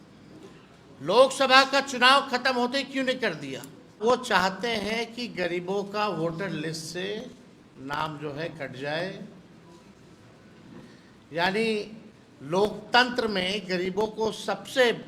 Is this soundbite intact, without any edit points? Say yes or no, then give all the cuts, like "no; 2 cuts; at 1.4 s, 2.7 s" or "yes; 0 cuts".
no; 1 cut; at 4.0 s